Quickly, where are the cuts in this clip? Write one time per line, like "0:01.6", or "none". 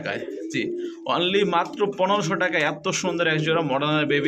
none